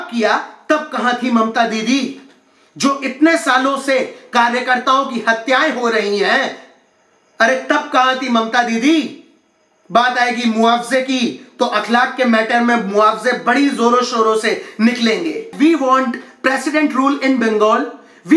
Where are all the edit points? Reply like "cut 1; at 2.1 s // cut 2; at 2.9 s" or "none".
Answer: cut 1; at 15.5 s